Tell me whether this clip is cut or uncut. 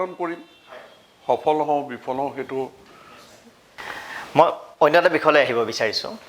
uncut